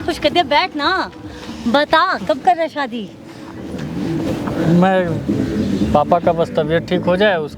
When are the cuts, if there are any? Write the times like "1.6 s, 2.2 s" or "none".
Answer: none